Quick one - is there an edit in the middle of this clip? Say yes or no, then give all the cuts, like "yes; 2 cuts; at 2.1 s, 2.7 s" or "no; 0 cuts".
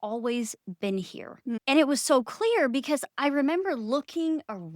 yes; 1 cut; at 1.6 s